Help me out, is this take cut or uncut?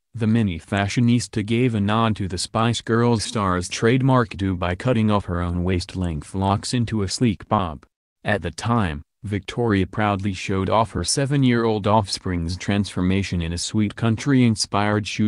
uncut